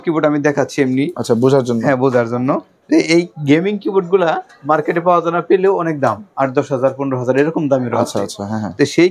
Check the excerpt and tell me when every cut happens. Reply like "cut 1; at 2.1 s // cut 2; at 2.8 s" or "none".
none